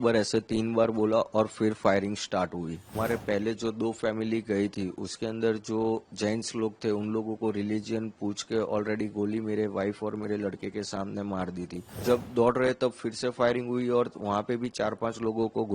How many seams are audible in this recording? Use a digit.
2